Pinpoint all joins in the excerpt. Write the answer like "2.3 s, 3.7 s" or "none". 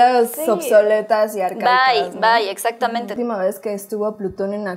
3.2 s